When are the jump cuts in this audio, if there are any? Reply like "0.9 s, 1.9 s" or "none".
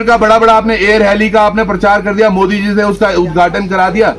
none